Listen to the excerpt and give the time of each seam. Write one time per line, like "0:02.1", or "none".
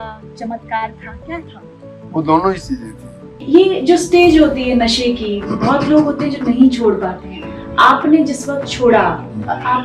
0:03.4